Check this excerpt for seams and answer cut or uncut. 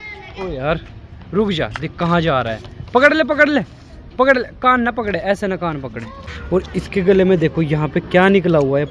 cut